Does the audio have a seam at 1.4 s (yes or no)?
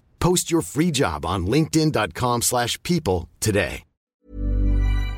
no